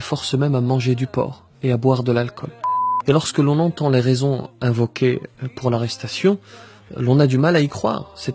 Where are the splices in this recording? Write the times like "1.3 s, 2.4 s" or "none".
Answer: 2.6 s